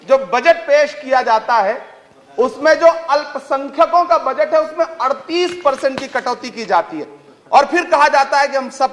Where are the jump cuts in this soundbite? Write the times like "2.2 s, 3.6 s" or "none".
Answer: none